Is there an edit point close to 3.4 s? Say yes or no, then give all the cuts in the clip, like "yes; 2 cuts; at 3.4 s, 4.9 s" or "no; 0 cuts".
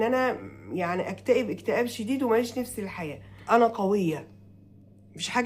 yes; 1 cut; at 3.4 s